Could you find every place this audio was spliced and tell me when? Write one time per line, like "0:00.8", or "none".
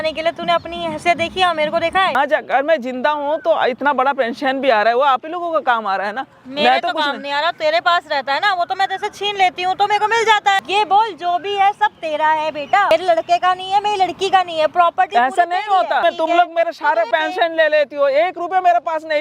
0:02.2
0:10.6
0:12.9
0:16.0
0:17.1

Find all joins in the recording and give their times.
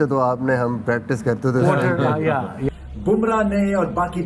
0:02.6

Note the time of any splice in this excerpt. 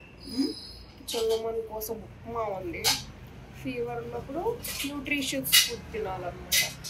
none

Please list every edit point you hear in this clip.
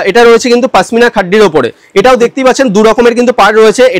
none

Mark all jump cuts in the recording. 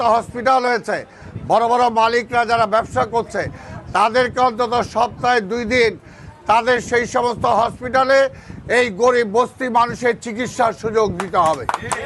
none

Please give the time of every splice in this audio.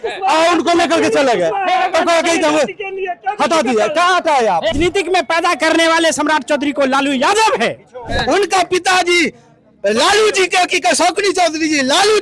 0:04.7
0:08.1

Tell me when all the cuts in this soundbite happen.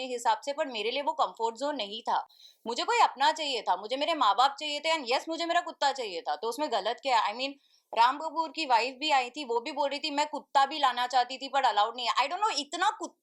none

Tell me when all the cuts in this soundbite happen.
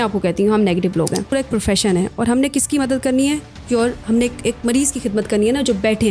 0:01.3

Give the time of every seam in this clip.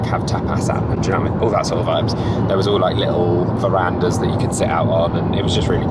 none

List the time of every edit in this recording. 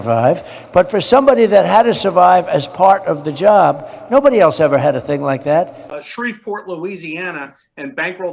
0:05.8

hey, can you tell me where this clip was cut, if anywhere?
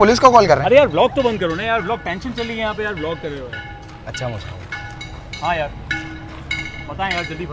none

